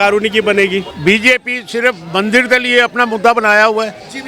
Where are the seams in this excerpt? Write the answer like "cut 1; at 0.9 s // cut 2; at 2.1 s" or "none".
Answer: cut 1; at 0.9 s